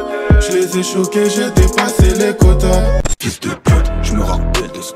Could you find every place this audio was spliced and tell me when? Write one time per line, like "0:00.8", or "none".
0:03.0